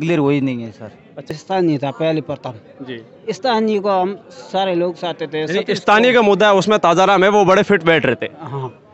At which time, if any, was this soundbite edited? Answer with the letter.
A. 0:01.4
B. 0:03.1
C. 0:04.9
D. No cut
A